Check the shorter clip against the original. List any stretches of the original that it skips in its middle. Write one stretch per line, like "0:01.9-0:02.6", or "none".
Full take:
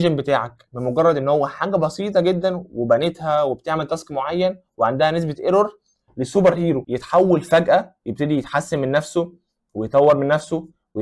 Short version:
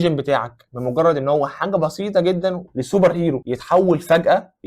0:02.6-0:06.1